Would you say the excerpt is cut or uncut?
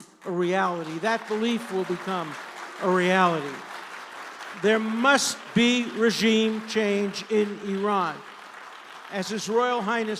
uncut